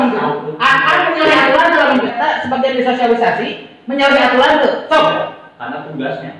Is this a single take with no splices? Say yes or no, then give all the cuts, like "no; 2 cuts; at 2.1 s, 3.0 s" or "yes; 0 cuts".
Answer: no; 1 cut; at 2.2 s